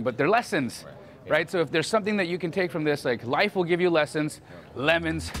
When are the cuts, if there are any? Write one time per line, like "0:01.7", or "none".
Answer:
none